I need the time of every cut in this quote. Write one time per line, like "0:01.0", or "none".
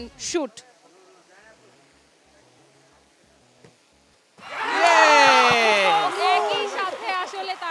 none

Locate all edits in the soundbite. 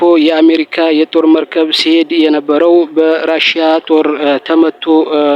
none

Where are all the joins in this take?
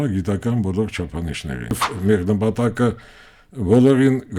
0:01.9

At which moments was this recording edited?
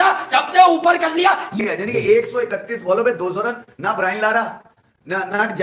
none

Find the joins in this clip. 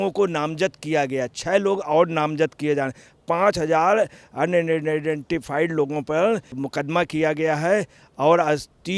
0:06.6

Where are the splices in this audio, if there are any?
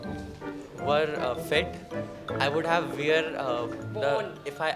none

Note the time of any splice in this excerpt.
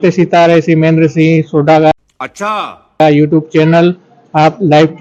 none

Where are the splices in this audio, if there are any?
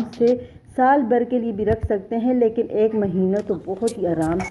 none

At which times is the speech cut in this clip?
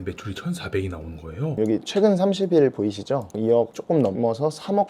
0:01.5
0:03.3

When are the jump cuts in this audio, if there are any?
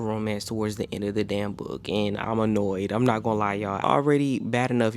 0:03.8

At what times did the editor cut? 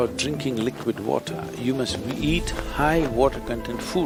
none

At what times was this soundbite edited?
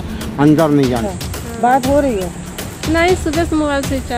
0:01.0

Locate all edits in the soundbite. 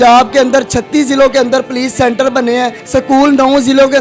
0:02.8

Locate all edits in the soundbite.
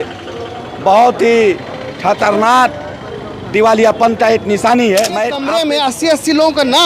0:05.4

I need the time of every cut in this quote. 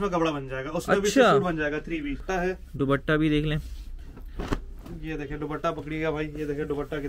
0:02.2

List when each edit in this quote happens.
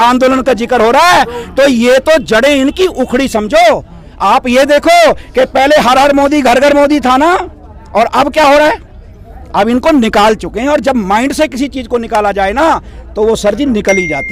none

